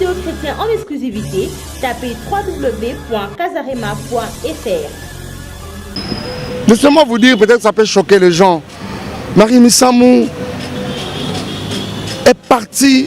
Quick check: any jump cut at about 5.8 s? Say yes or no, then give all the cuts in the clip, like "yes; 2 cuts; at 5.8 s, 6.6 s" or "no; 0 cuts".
yes; 1 cut; at 5.8 s